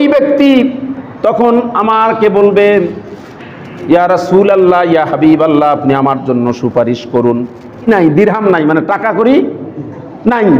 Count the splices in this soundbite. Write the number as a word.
one